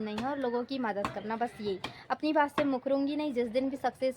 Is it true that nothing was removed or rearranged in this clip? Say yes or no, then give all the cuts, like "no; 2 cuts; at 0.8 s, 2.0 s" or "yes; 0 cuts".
no; 1 cut; at 2.4 s